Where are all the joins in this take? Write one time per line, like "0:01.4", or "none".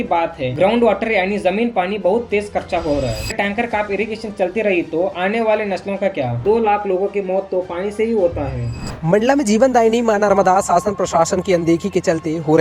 0:03.3
0:06.3
0:08.7